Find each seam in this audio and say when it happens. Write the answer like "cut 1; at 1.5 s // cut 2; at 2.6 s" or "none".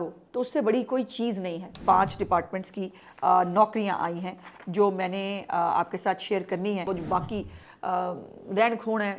cut 1; at 1.7 s // cut 2; at 6.9 s